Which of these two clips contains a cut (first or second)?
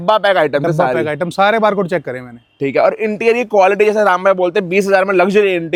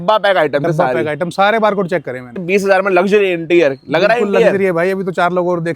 second